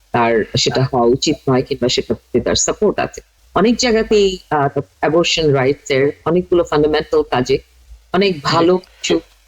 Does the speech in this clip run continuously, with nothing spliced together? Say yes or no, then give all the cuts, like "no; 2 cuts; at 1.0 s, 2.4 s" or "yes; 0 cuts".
no; 1 cut; at 3.3 s